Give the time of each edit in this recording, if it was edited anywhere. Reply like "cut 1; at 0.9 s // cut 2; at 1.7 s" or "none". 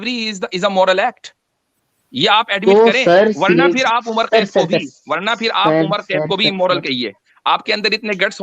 none